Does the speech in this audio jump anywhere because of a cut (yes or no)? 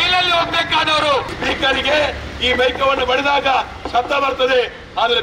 yes